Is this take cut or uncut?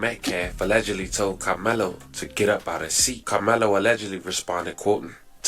cut